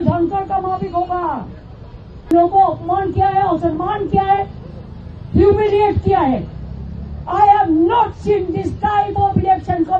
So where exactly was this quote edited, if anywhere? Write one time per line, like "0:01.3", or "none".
0:02.3